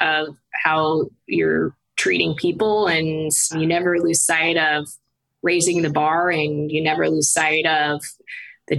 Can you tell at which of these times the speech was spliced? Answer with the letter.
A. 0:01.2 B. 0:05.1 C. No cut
C